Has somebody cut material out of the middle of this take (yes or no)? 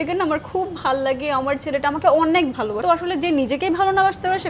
yes